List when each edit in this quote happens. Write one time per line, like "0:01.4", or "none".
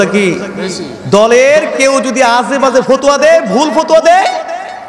none